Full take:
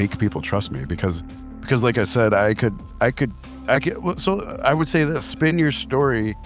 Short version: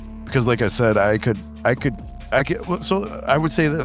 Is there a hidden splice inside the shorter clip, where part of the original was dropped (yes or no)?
no